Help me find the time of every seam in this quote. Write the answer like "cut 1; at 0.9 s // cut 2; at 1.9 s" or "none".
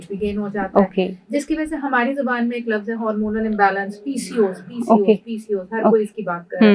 none